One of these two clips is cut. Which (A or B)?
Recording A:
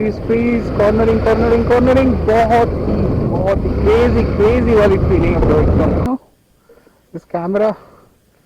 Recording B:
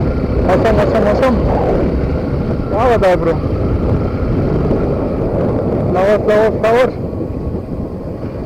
A